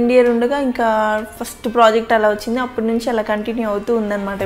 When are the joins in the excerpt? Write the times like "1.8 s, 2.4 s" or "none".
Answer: none